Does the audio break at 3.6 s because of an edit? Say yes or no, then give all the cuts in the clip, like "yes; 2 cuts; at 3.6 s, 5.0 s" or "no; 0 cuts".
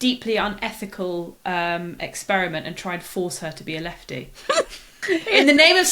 no; 1 cut; at 4.9 s